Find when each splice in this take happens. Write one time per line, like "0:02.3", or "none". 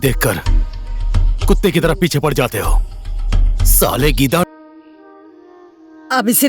0:04.4

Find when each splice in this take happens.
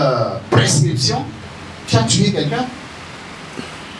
none

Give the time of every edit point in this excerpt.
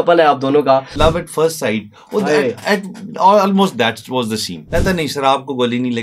0:00.9
0:04.5

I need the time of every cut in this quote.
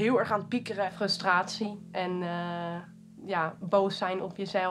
0:00.9

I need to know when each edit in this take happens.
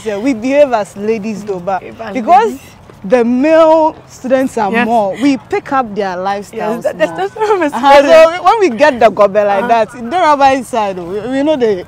none

